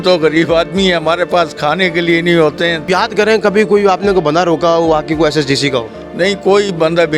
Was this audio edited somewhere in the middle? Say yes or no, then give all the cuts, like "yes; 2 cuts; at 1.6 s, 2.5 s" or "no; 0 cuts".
yes; 1 cut; at 2.8 s